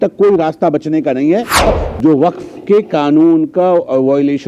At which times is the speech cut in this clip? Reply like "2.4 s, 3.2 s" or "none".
1.7 s